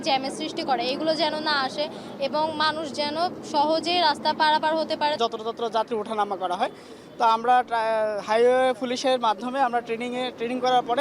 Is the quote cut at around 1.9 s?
no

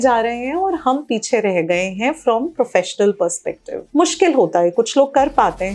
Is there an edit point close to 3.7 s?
yes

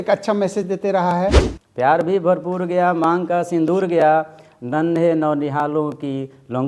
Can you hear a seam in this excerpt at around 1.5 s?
yes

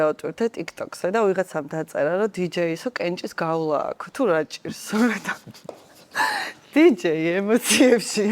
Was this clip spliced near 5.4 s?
no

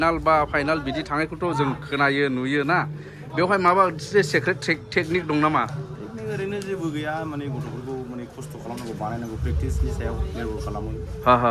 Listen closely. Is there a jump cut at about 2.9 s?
no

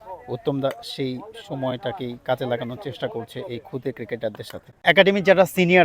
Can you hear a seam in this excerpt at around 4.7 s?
yes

